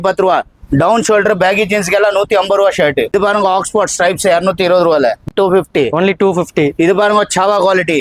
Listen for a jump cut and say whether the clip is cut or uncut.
cut